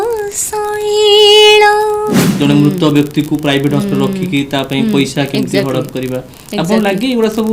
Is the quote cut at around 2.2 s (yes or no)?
yes